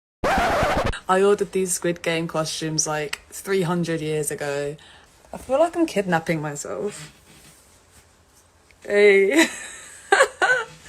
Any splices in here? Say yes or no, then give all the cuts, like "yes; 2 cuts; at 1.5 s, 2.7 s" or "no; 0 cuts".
yes; 2 cuts; at 0.9 s, 4.9 s